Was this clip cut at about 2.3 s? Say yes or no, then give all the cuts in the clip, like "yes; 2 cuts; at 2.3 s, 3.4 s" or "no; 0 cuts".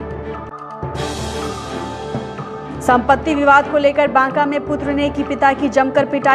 yes; 1 cut; at 2.3 s